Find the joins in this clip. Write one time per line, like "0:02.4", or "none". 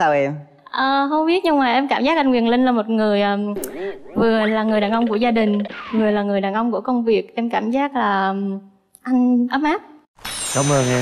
none